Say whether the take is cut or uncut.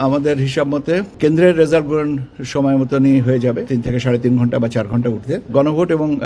cut